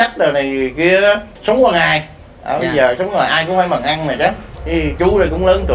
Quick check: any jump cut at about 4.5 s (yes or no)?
yes